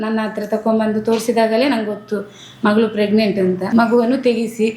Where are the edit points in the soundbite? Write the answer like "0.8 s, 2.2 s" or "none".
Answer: 3.6 s